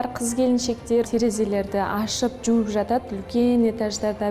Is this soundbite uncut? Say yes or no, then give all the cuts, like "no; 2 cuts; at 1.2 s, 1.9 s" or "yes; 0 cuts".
no; 1 cut; at 1.0 s